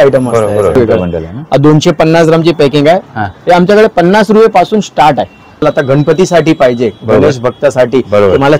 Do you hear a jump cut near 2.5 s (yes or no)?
no